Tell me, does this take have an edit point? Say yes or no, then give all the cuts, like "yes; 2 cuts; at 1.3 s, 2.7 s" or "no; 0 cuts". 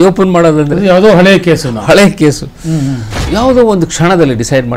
yes; 1 cut; at 3.3 s